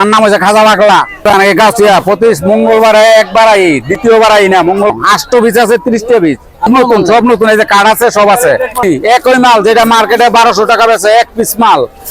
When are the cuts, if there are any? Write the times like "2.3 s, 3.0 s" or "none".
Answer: 1.2 s, 4.9 s, 6.7 s, 8.8 s